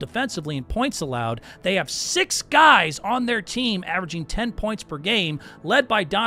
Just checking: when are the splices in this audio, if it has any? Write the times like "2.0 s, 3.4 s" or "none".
none